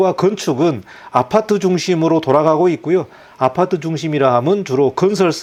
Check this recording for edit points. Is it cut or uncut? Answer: uncut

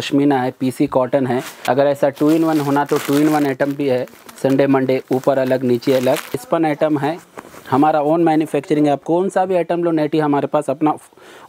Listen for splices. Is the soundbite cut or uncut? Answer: cut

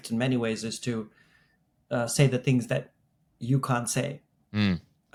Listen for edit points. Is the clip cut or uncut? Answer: uncut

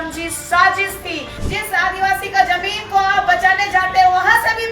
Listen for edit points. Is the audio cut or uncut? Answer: cut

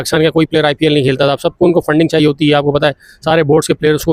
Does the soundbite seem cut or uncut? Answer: uncut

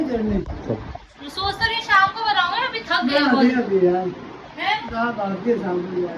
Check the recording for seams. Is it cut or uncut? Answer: uncut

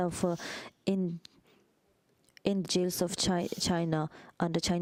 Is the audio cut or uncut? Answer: uncut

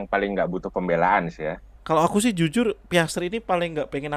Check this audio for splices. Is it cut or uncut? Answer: cut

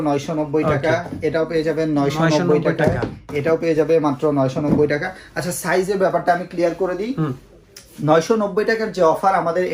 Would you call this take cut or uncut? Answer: uncut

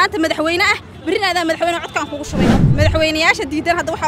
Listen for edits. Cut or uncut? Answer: cut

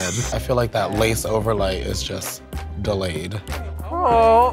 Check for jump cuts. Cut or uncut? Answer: uncut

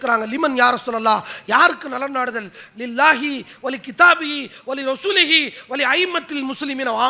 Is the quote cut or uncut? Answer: uncut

